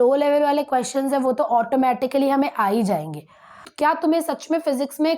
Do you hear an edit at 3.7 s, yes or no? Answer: yes